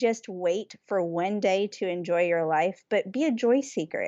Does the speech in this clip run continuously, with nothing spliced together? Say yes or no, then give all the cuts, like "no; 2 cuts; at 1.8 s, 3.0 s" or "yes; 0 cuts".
yes; 0 cuts